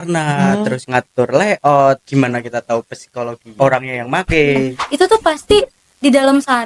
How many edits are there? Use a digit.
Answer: 4